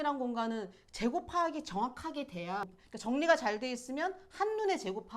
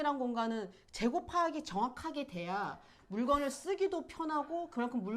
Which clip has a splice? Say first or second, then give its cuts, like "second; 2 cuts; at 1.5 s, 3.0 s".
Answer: first; 1 cut; at 2.7 s